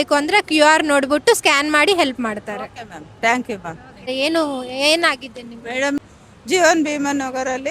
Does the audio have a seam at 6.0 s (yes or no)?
yes